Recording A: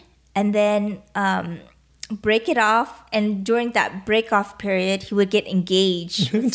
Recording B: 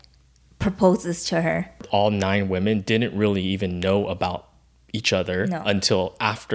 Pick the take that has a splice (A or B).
B